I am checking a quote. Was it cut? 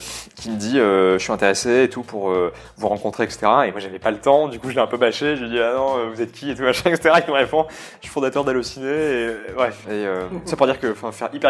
yes; 1 cut; at 9.8 s

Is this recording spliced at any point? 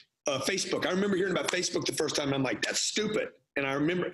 no; 0 cuts

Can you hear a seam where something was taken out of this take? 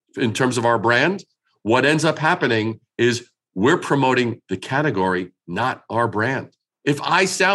no; 0 cuts

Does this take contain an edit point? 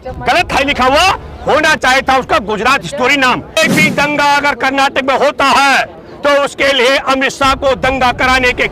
yes; 1 cut; at 3.6 s

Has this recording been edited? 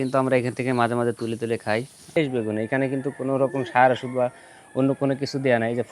yes; 1 cut; at 2.2 s

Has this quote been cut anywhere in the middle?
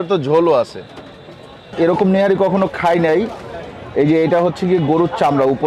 yes; 1 cut; at 1.7 s

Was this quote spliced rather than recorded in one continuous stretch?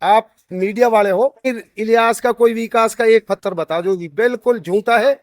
yes; 1 cut; at 1.5 s

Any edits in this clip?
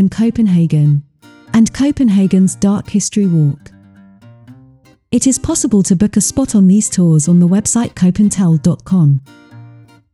yes; 1 cut; at 9.2 s

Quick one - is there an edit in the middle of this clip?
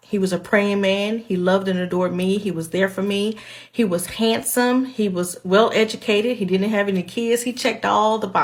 no; 0 cuts

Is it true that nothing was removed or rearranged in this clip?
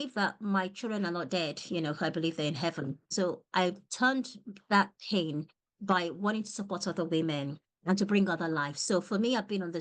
no; 1 cut; at 3.1 s

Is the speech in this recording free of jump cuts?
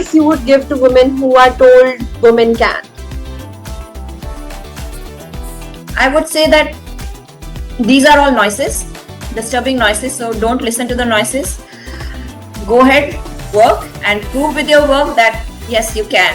yes; 0 cuts

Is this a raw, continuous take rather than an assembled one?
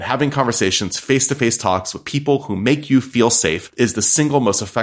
no; 1 cut; at 3.6 s

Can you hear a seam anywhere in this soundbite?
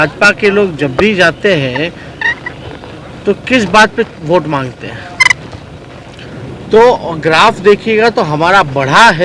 yes; 1 cut; at 6.2 s

